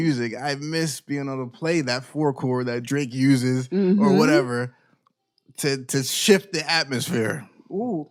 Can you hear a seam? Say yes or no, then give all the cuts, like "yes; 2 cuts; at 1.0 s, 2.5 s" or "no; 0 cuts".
no; 0 cuts